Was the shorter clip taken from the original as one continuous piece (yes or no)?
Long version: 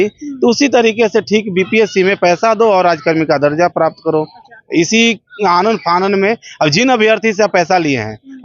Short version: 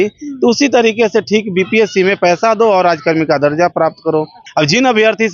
no